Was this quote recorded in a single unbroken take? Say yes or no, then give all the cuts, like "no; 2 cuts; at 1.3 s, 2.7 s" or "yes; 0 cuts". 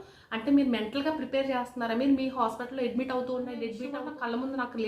no; 1 cut; at 3.9 s